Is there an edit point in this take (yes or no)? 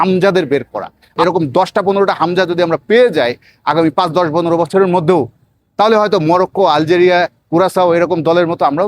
yes